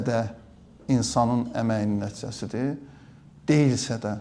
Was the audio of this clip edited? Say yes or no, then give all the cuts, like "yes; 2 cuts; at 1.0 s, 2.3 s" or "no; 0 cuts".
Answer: no; 0 cuts